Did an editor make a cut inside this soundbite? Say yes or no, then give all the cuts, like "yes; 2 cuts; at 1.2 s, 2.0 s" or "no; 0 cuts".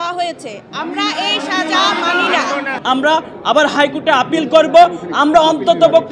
yes; 1 cut; at 2.8 s